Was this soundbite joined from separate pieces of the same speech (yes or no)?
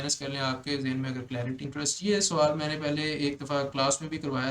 yes